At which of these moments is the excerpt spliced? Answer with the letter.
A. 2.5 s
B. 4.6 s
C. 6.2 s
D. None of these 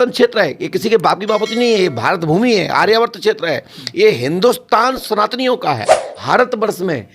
C